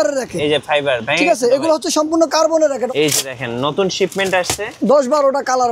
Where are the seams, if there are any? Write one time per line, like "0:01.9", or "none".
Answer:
0:02.9